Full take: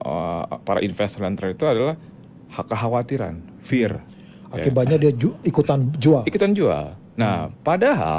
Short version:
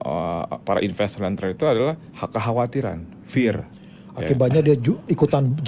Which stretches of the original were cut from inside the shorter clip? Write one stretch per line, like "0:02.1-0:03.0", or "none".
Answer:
0:02.1-0:02.5